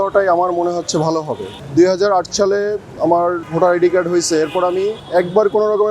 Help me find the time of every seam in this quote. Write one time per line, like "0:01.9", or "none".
0:01.5
0:03.4